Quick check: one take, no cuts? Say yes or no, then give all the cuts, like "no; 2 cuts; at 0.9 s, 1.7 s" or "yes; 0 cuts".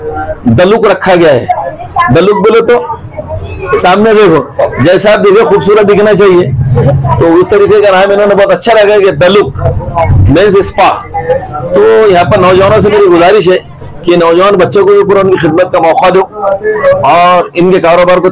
yes; 0 cuts